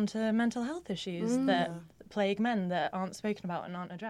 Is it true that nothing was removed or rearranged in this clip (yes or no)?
yes